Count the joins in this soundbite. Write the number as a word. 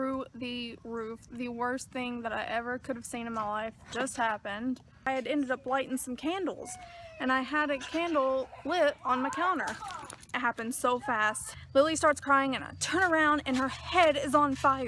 three